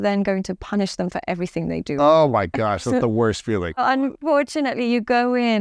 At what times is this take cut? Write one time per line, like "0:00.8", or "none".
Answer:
0:03.8